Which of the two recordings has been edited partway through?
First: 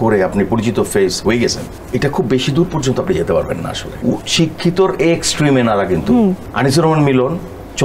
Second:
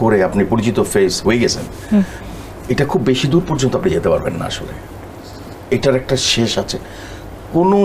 first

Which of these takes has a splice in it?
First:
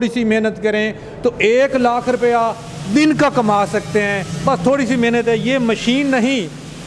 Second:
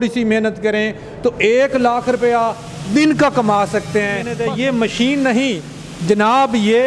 second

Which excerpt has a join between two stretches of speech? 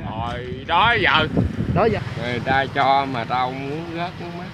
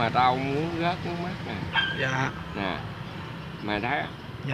first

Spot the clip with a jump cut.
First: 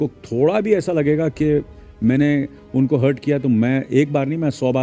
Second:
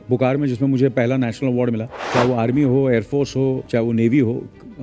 second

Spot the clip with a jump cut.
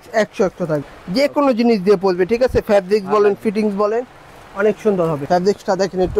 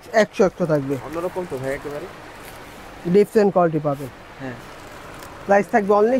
first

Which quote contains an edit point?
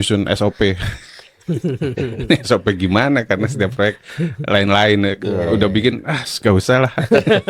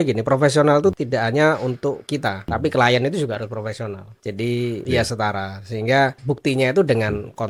second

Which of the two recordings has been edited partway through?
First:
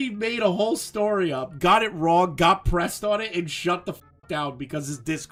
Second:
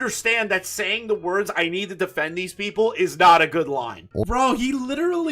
second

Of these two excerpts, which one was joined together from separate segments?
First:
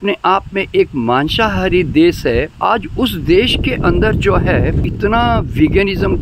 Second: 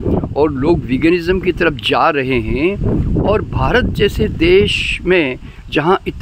first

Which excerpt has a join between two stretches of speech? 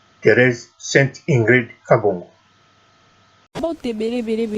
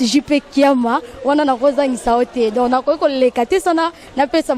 first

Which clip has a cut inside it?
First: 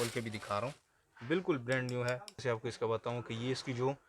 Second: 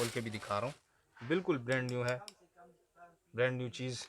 first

